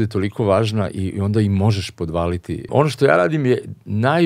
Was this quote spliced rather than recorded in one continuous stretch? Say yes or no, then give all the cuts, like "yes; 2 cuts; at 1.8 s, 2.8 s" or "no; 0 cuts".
yes; 1 cut; at 2.6 s